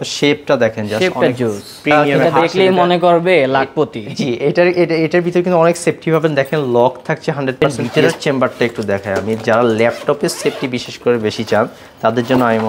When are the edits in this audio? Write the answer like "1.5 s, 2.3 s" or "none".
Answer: 2.1 s, 7.6 s